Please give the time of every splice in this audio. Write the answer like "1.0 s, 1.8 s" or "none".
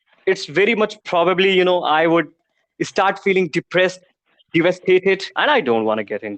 5.3 s